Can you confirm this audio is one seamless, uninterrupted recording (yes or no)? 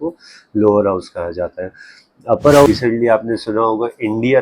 no